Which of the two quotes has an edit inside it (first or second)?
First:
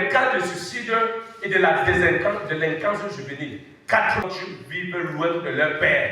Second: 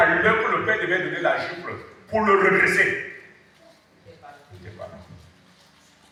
first